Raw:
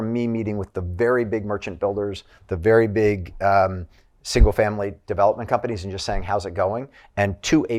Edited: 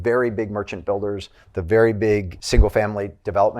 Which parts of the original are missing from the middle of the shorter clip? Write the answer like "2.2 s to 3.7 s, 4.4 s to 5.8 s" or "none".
3.3 s to 4.2 s